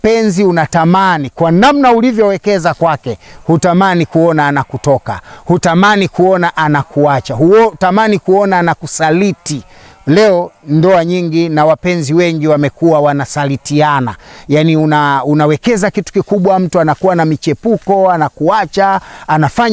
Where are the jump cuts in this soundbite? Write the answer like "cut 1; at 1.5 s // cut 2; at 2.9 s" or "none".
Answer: none